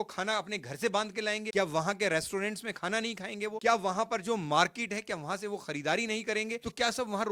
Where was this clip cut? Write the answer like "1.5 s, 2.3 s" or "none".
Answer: none